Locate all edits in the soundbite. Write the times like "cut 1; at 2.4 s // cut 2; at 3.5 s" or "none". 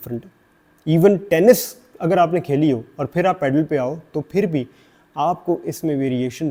none